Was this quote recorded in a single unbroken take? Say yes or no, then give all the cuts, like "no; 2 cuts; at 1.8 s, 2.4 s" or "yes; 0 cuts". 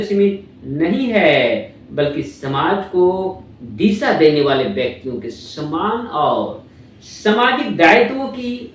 yes; 0 cuts